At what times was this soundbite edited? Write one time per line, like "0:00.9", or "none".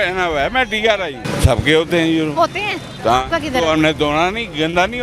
0:01.2